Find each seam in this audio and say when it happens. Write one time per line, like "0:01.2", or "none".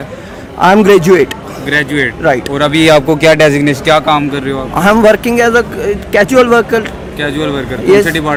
none